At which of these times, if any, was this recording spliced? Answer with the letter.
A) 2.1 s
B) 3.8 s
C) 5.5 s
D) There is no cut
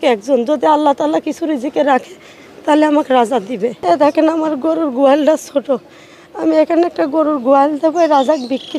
B